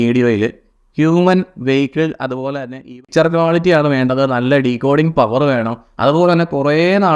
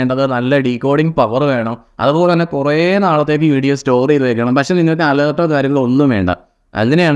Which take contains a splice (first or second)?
first